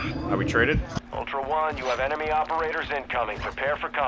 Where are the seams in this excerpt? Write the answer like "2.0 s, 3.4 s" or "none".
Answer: 0.9 s